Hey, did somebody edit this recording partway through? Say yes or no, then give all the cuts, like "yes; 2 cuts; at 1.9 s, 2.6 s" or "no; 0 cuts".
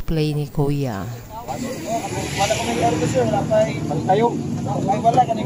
no; 0 cuts